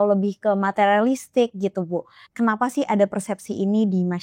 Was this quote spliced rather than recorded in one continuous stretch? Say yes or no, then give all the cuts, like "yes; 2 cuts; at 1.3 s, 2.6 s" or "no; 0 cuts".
yes; 1 cut; at 2.2 s